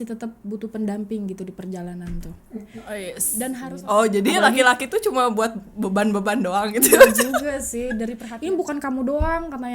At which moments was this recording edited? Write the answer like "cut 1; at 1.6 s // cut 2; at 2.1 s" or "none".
cut 1; at 3.6 s // cut 2; at 8.2 s